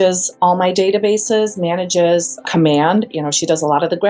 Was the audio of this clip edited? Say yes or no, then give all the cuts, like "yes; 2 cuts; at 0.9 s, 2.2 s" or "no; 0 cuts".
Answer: yes; 3 cuts; at 0.7 s, 2.3 s, 3.1 s